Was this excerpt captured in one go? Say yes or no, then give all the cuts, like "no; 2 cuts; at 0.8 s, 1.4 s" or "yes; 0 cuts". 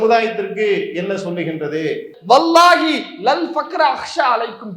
no; 1 cut; at 2.1 s